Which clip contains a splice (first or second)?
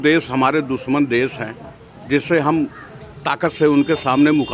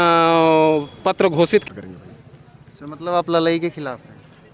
second